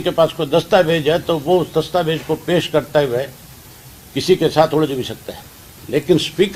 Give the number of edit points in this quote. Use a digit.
0